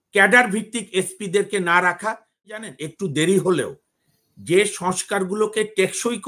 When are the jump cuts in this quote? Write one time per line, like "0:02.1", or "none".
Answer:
0:02.5